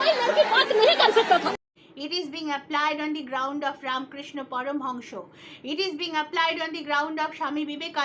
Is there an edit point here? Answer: yes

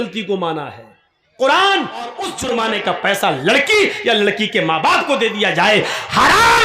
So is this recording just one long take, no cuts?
no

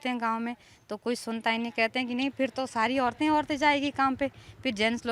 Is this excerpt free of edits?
yes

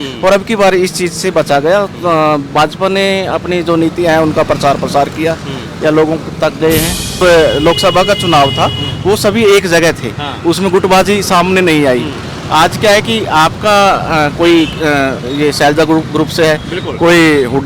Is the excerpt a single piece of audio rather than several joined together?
no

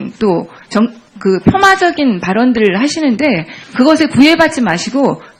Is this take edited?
no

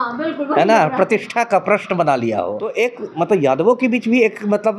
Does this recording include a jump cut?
yes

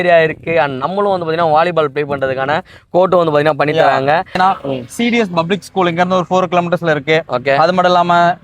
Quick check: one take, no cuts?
no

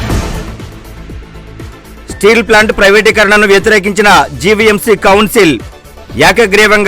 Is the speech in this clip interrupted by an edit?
yes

